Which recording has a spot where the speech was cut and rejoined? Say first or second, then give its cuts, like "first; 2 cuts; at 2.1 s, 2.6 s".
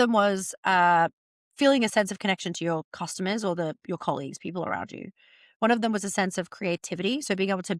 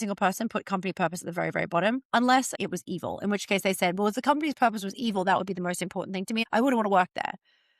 second; 2 cuts; at 2.5 s, 6.4 s